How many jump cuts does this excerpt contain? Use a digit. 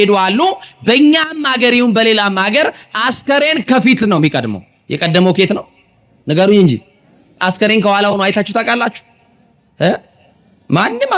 0